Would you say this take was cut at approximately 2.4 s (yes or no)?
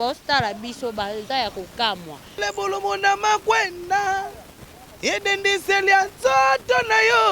yes